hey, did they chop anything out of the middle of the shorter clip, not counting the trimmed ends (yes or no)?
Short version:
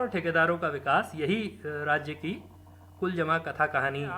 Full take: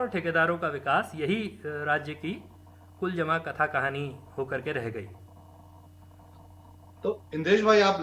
no